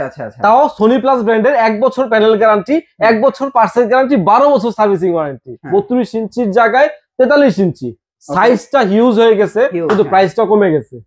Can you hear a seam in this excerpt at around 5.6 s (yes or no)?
yes